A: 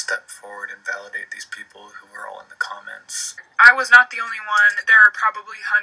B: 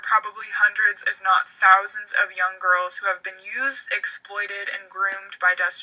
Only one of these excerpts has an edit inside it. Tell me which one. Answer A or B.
A